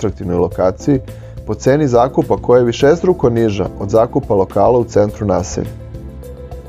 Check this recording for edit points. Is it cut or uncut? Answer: uncut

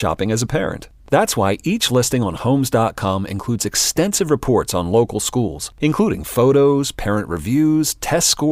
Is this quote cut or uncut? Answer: uncut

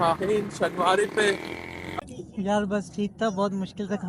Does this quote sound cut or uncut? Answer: cut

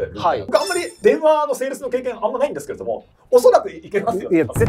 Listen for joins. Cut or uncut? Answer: cut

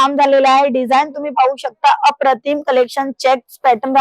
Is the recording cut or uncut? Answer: uncut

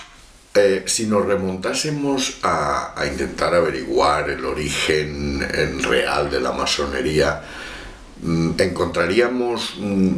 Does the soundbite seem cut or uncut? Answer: uncut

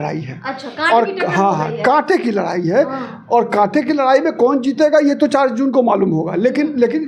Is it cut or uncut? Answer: uncut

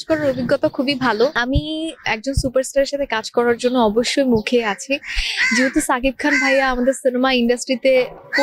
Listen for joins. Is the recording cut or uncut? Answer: cut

